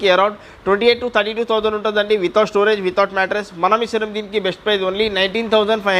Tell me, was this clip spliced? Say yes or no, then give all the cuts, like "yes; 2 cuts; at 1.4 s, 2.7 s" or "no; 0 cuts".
no; 0 cuts